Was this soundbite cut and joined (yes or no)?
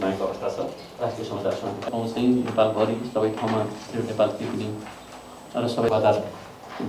yes